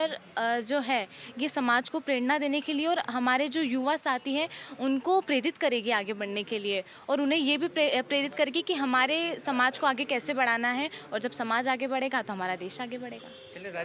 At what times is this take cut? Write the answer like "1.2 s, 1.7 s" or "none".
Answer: none